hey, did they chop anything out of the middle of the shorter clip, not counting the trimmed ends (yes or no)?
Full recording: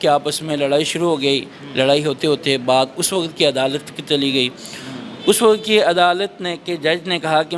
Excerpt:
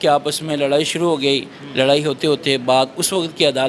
no